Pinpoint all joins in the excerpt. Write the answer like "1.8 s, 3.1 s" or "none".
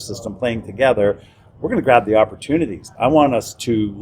2.9 s